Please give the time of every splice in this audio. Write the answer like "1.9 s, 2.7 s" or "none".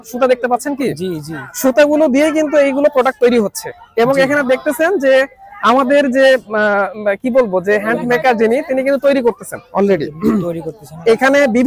none